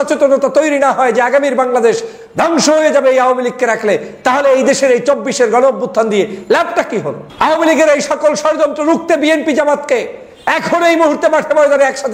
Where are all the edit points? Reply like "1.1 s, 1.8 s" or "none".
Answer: 7.2 s